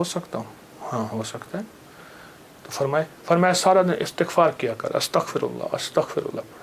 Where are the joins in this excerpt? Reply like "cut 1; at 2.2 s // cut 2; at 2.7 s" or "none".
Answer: none